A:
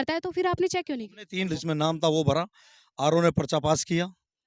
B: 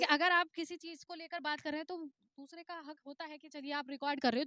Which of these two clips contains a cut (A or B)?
A